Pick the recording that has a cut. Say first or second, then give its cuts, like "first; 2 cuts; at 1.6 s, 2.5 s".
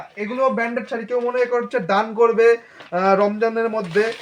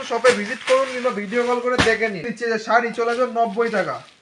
second; 1 cut; at 2.3 s